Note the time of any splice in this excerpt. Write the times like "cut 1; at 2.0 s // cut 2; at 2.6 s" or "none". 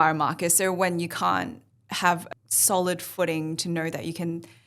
cut 1; at 2.2 s